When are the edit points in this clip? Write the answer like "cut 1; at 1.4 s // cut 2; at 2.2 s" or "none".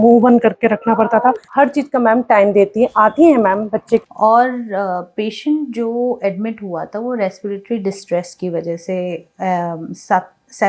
cut 1; at 1.4 s // cut 2; at 4.1 s